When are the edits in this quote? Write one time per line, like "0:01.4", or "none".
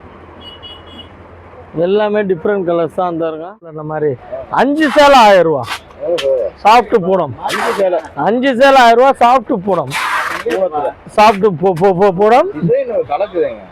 0:03.9